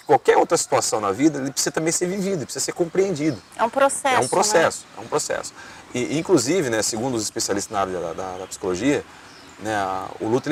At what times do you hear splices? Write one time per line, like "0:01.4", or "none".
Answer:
none